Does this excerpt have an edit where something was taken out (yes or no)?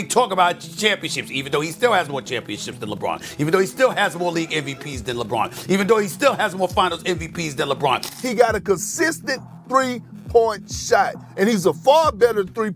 yes